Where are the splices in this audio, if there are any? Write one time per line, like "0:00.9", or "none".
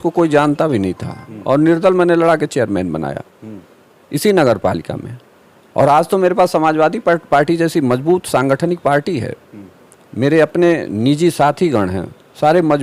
none